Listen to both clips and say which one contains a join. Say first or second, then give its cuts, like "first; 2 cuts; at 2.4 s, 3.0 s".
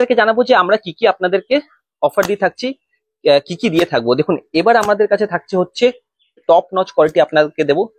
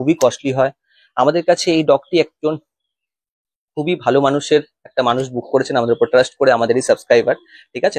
first; 1 cut; at 6.4 s